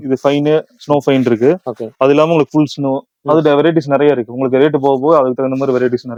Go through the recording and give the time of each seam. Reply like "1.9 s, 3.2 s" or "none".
none